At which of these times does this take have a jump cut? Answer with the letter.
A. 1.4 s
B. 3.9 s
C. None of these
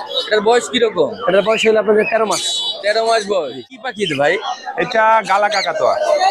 B